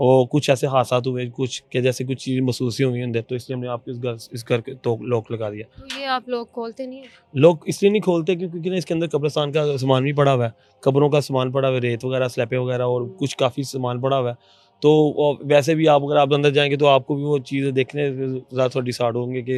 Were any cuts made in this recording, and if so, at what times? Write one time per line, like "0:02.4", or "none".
none